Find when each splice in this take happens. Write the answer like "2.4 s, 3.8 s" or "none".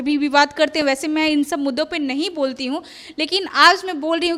none

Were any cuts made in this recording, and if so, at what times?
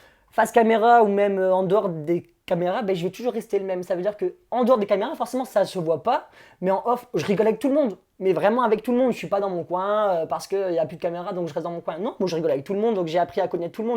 none

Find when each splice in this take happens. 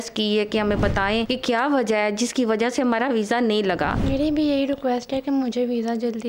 1.3 s, 4.0 s

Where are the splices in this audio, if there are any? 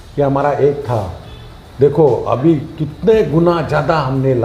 none

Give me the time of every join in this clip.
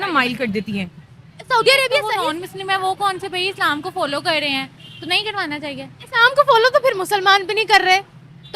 2.1 s

